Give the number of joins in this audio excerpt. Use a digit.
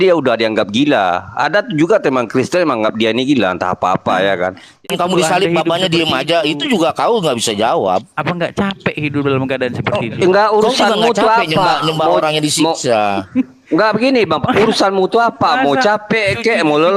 1